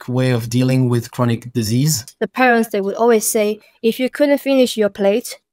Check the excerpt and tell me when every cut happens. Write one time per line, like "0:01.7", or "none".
0:02.0

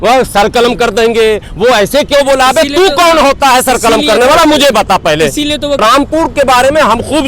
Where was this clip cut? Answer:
0:05.8

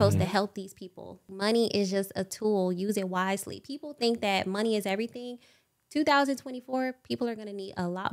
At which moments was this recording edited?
0:01.3

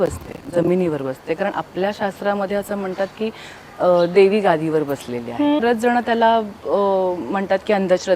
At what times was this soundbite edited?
0:05.6

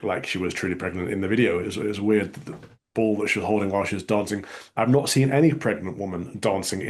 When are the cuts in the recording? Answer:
none

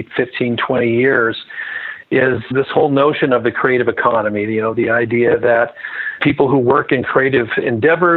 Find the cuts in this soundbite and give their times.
0:02.4
0:06.2

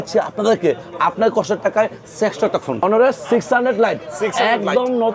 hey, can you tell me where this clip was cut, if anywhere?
0:02.8

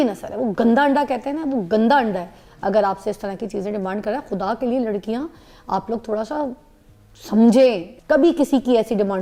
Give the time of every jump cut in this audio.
none

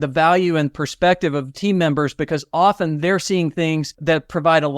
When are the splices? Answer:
0:01.5
0:03.9

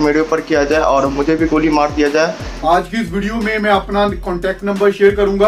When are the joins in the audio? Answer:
0:02.4

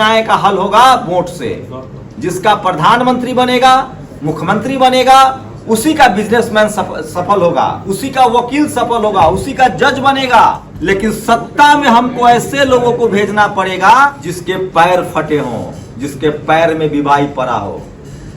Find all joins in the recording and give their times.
0:10.7
0:14.3

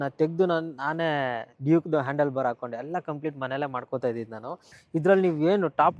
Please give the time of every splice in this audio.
0:01.5
0:04.7

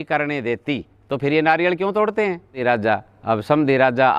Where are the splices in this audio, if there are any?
0:02.6

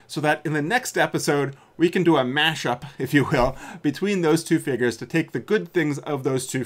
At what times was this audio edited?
none

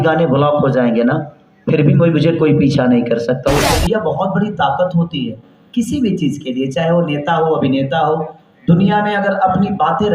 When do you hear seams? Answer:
0:03.6

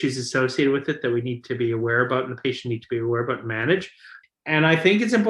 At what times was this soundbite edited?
0:04.1

